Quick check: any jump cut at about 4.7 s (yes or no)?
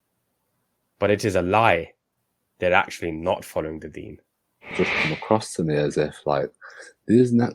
yes